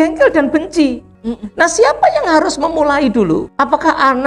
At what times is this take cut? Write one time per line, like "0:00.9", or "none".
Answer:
0:01.1
0:03.5

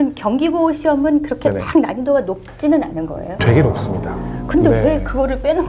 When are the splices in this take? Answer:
none

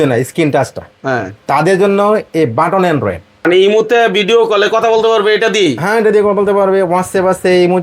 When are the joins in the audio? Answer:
0:03.4

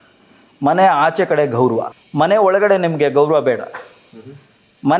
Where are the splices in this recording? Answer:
0:02.0

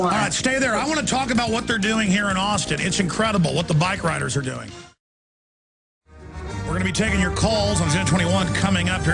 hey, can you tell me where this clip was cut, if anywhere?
0:04.5

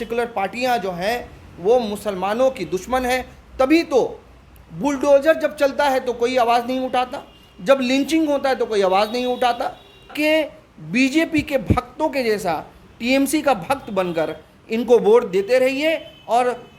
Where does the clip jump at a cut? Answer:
0:10.1

